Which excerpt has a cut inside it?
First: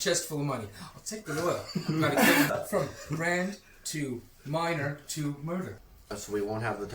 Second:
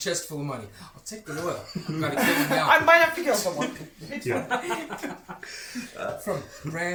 first; 2 cuts; at 2.5 s, 5.9 s

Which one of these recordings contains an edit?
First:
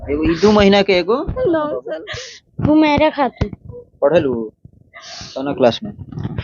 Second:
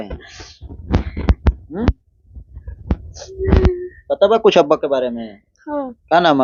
first; 1 cut; at 2.0 s

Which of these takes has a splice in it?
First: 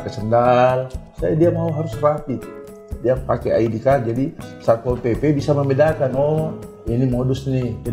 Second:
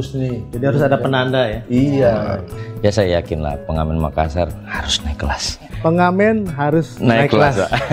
second; 2 cuts; at 2.6 s, 5.7 s

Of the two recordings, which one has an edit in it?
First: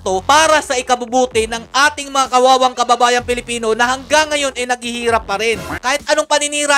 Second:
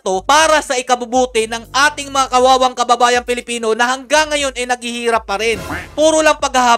first; 1 cut; at 5.7 s

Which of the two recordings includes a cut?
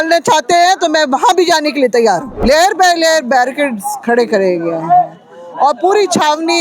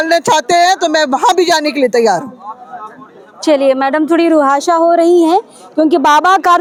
first; 1 cut; at 2.3 s

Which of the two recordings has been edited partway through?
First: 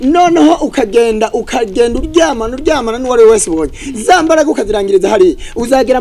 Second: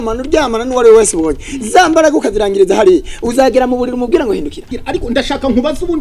second; 1 cut; at 4.7 s

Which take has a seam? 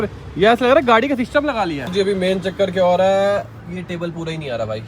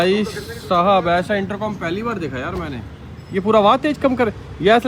first; 1 cut; at 1.9 s

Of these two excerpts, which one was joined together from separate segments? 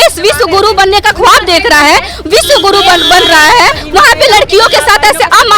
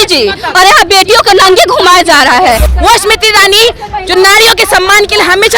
second; 1 cut; at 2.7 s

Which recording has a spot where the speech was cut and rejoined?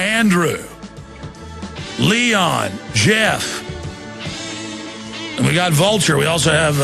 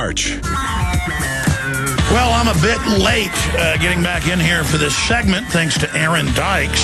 first; 1 cut; at 3.5 s

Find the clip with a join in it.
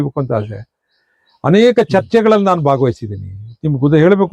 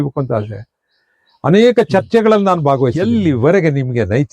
second; 1 cut; at 3.0 s

